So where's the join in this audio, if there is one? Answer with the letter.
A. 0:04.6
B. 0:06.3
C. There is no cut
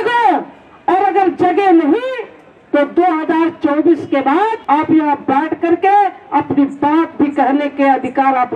A